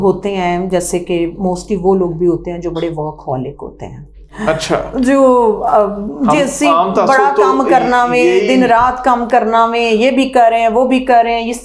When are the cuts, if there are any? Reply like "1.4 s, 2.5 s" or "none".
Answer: none